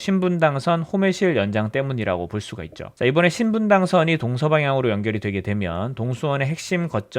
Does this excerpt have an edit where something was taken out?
yes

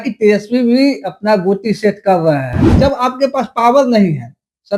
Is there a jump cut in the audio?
yes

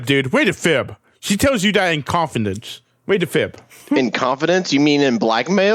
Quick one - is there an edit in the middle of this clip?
no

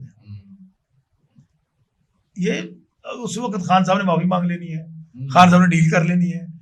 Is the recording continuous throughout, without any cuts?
yes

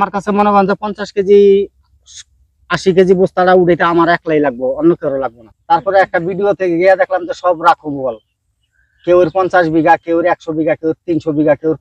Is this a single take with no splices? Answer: no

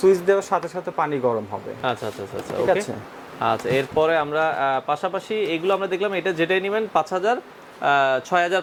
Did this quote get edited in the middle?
no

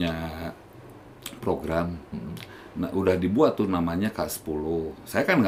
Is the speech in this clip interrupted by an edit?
no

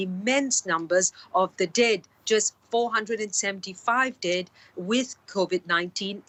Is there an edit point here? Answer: no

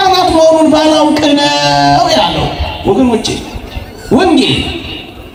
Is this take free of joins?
yes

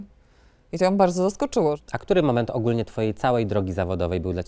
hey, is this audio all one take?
no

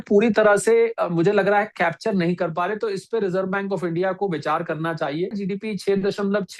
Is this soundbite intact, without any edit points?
no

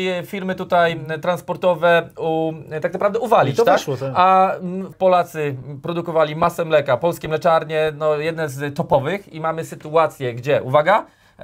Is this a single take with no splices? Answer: no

